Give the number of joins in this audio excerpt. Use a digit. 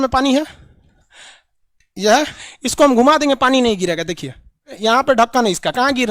2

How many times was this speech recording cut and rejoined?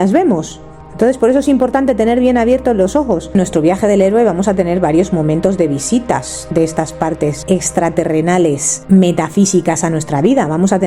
3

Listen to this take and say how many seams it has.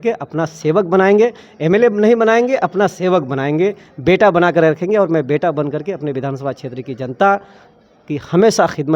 0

